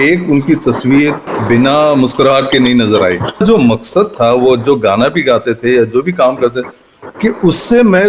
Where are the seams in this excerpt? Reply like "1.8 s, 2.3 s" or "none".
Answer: 1.3 s, 3.4 s